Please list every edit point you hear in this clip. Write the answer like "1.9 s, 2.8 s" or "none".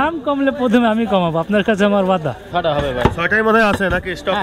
2.4 s